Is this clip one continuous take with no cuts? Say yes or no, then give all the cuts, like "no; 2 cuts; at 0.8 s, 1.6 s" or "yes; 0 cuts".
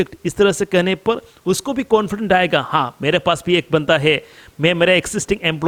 yes; 0 cuts